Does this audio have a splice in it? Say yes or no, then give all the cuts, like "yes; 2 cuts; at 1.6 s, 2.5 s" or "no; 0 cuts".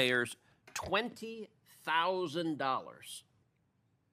no; 0 cuts